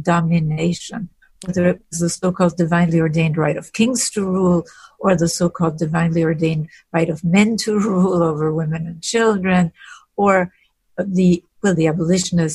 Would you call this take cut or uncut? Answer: uncut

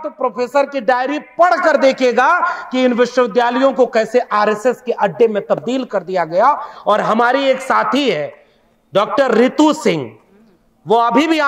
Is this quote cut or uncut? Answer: uncut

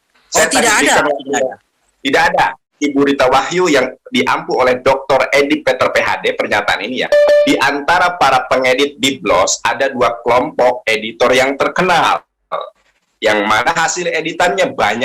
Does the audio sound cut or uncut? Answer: cut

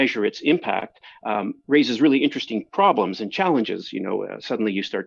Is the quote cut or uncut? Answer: uncut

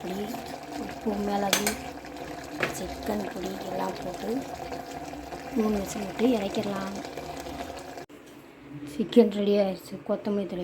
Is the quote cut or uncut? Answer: cut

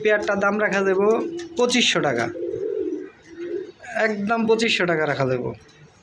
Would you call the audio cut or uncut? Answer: uncut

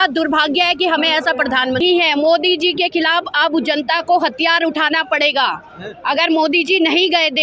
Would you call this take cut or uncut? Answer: cut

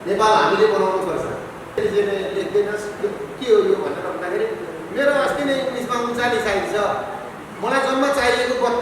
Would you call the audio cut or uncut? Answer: cut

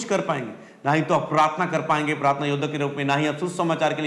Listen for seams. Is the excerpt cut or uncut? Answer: uncut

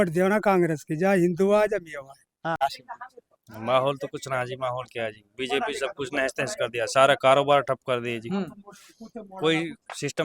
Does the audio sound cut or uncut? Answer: cut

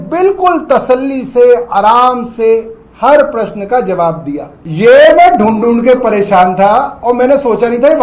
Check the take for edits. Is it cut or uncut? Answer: cut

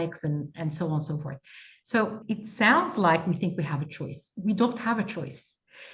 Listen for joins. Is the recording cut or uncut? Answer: cut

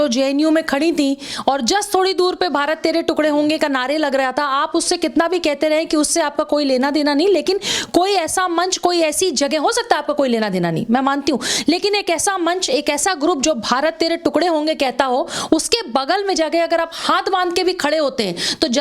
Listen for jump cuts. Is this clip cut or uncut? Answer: uncut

